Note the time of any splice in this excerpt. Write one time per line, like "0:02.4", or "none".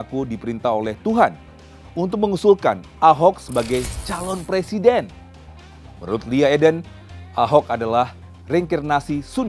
none